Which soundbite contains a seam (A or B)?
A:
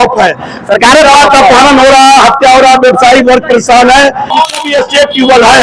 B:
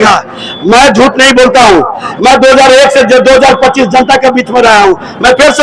A